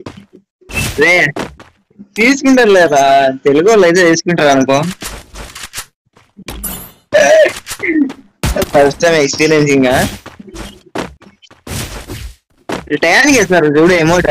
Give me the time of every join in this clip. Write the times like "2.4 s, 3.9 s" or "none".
6.2 s